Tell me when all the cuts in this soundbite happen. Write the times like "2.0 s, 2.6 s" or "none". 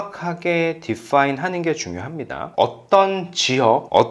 2.4 s

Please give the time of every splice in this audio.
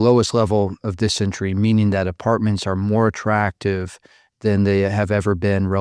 none

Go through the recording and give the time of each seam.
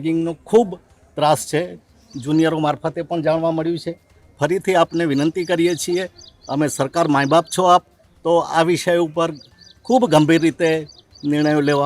none

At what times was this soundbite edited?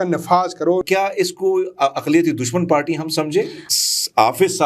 0.8 s, 3.6 s

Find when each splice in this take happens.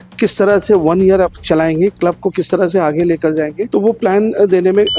3.6 s

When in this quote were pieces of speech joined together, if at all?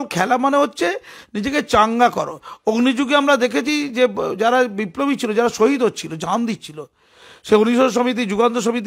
none

